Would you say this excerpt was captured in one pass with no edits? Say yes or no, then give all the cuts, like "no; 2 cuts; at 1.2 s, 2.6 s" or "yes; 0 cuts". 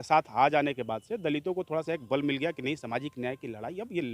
yes; 0 cuts